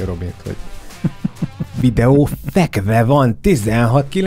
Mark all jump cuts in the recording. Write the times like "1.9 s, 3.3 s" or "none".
none